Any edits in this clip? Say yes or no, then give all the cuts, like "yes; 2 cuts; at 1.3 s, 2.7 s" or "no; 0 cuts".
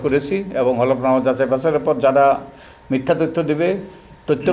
no; 0 cuts